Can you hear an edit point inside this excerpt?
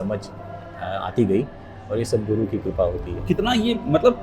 no; 0 cuts

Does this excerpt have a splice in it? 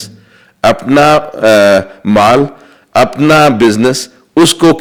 no; 0 cuts

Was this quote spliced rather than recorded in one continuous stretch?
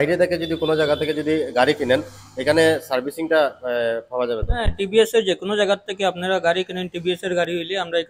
no; 0 cuts

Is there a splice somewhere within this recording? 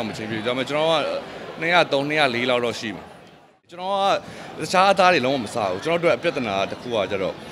yes; 1 cut; at 3.7 s

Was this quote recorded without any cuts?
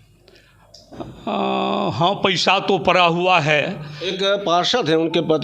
no; 1 cut; at 4.0 s

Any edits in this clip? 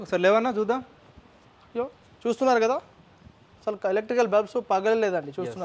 no; 0 cuts

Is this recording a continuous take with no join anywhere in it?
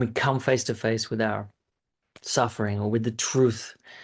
yes; 0 cuts

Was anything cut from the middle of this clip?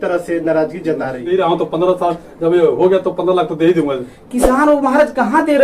yes; 1 cut; at 1.2 s

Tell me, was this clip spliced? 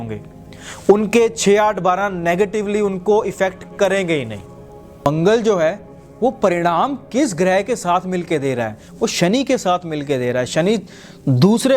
yes; 1 cut; at 5.0 s

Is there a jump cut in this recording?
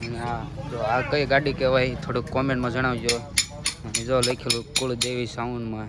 no; 0 cuts

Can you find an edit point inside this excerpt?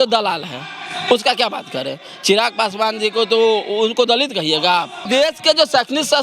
yes; 1 cut; at 5.0 s

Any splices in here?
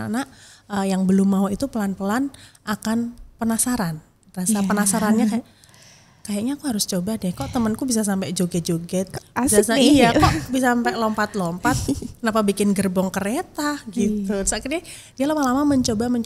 no; 0 cuts

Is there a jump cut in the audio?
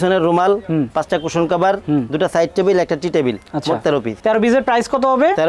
no; 0 cuts

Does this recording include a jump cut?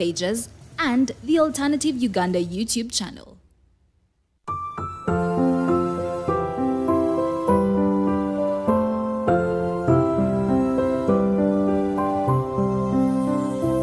yes; 1 cut; at 4.4 s

